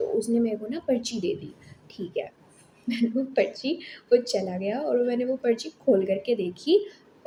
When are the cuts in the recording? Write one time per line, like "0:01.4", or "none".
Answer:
none